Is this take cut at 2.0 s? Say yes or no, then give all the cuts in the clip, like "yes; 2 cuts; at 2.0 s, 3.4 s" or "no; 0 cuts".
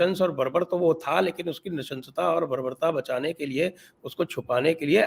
no; 0 cuts